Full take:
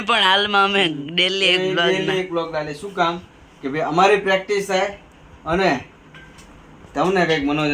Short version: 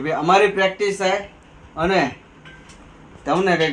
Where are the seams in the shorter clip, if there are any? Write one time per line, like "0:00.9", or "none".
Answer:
none